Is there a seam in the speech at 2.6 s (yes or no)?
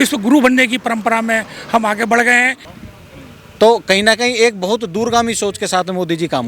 yes